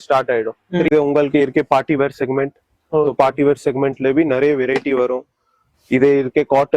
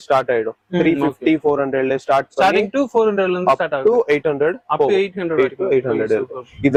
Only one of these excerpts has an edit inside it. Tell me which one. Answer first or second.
first